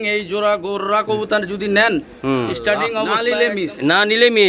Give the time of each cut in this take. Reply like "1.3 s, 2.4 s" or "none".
3.1 s